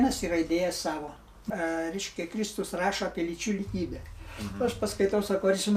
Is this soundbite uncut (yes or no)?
no